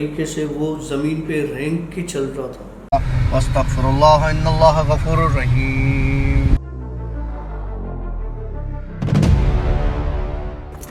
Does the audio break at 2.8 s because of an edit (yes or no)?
yes